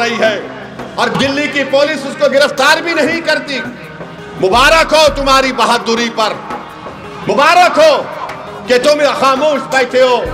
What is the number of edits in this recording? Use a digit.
0